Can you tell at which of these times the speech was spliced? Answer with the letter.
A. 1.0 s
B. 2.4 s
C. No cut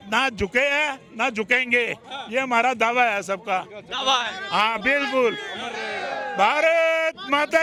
C